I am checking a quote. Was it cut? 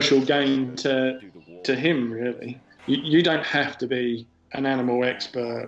yes; 2 cuts; at 2.7 s, 4.4 s

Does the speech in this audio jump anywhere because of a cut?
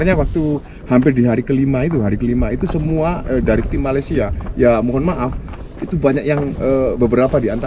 no; 0 cuts

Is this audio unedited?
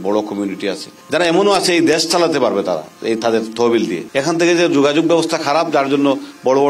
no; 2 cuts; at 0.9 s, 4.0 s

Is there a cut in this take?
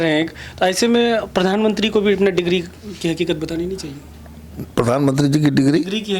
no; 0 cuts

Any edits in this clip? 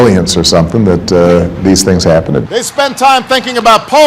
yes; 1 cut; at 2.4 s

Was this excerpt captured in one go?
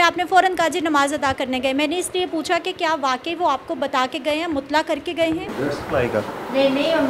no; 1 cut; at 5.7 s

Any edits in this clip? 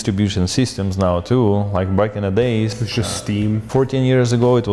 no; 0 cuts

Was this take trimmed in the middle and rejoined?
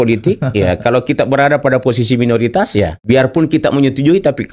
yes; 1 cut; at 3.0 s

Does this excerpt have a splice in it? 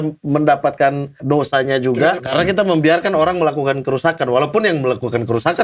yes; 2 cuts; at 1.2 s, 2.2 s

